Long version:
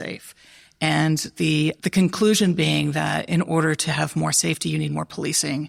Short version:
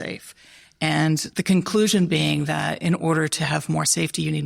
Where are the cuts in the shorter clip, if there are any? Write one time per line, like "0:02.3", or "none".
0:01.3